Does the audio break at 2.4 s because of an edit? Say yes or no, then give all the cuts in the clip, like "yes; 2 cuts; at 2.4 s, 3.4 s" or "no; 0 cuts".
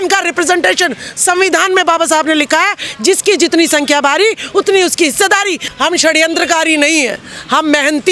no; 1 cut; at 5.6 s